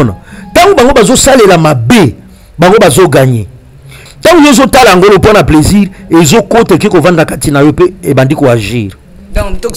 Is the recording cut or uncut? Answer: cut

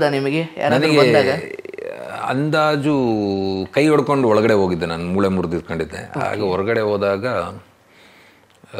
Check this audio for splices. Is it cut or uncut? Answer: uncut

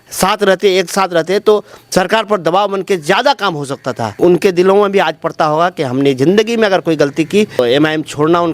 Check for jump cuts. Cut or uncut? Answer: cut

